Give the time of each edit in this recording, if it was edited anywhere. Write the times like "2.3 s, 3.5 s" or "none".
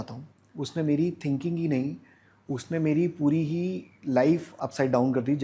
4.5 s